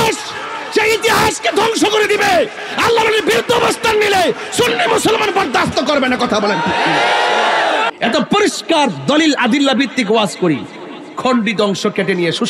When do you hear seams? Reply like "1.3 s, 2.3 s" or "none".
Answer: 7.9 s